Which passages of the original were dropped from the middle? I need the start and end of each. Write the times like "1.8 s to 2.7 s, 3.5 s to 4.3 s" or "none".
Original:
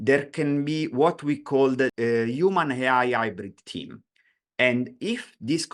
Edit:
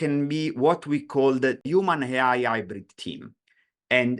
2.0 s to 2.3 s